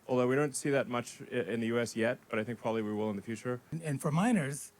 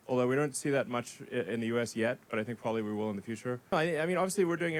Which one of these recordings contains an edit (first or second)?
first